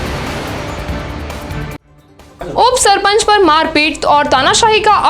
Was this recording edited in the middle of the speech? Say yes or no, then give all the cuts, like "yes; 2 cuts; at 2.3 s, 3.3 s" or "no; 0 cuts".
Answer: yes; 1 cut; at 1.8 s